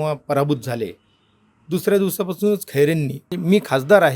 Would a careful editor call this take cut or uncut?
cut